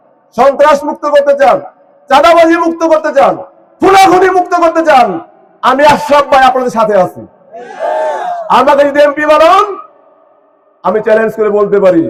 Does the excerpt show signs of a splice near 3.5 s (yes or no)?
no